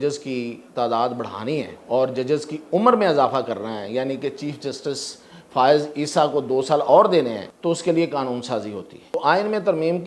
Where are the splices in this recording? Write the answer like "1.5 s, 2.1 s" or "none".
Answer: 1.8 s, 7.5 s, 9.1 s